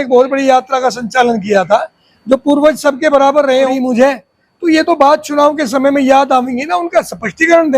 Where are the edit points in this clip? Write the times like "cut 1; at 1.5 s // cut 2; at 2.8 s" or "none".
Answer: cut 1; at 3.7 s